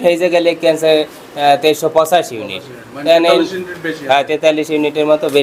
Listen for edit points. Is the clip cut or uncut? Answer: uncut